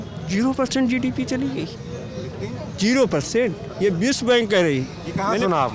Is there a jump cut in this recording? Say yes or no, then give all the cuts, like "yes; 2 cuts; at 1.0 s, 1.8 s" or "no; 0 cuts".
no; 0 cuts